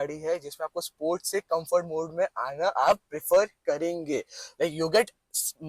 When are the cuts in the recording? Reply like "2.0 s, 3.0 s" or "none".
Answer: none